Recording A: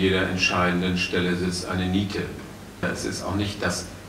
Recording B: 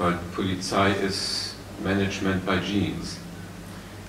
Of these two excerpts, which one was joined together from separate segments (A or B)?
A